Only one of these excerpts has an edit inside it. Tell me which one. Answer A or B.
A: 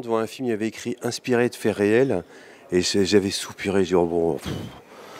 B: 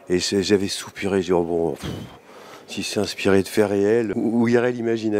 B